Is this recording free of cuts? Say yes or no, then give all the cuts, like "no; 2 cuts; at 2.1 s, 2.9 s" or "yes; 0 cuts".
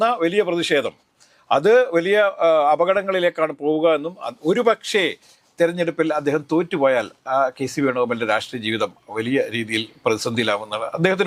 yes; 0 cuts